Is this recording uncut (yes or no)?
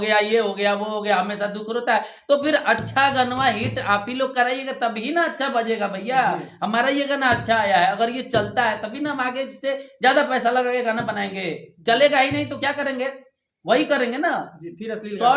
yes